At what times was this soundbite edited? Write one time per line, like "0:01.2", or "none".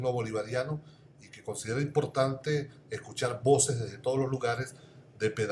0:01.9